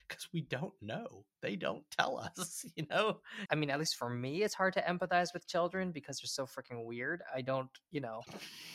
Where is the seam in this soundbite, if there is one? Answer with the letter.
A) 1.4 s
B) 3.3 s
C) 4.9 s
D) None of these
B